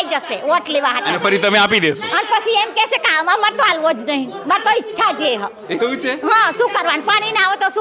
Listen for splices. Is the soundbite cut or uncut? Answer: uncut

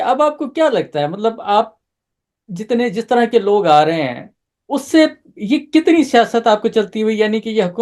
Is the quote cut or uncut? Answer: uncut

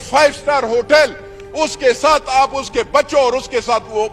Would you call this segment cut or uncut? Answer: uncut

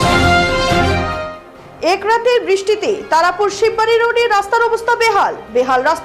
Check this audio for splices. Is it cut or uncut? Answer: cut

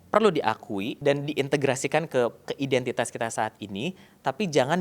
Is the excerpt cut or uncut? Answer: cut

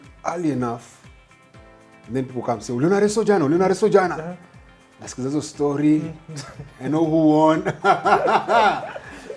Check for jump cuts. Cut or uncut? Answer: uncut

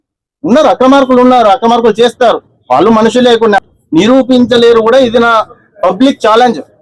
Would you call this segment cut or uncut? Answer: cut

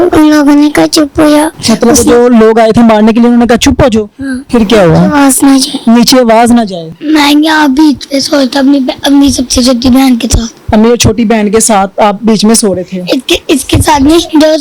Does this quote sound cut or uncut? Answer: cut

